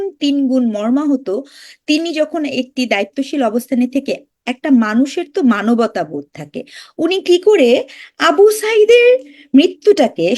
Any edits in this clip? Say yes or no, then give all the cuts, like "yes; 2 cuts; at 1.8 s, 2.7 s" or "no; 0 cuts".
no; 0 cuts